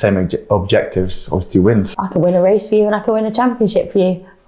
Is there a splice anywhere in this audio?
yes; 1 cut; at 1.9 s

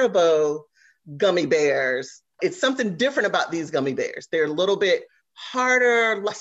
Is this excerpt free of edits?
no; 1 cut; at 2.4 s

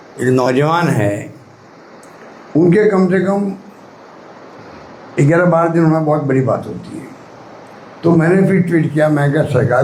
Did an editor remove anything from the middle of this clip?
no; 0 cuts

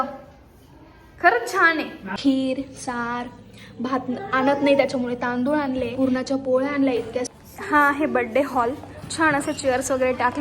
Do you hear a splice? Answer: yes; 3 cuts; at 2.0 s, 5.9 s, 7.3 s

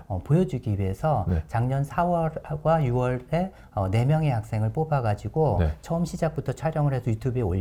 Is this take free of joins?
yes; 0 cuts

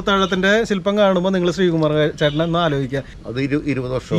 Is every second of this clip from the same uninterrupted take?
no; 1 cut; at 3.1 s

